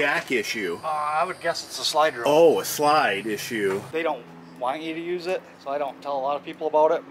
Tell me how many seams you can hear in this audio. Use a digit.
2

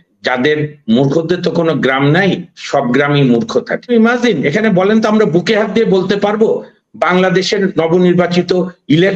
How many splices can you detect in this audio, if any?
1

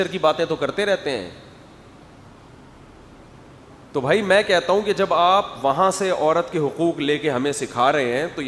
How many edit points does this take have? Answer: 1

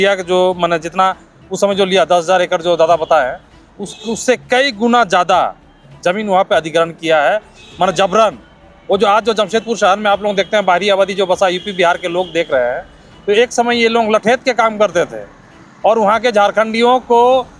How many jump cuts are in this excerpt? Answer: 0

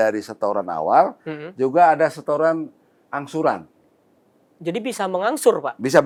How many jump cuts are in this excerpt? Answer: 0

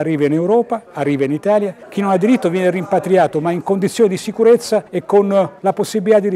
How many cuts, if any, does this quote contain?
3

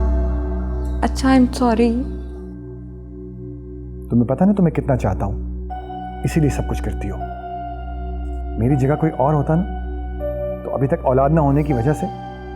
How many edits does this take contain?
0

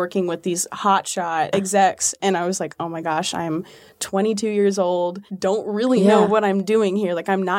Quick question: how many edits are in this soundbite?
2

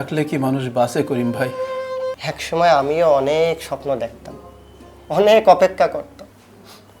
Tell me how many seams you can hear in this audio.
1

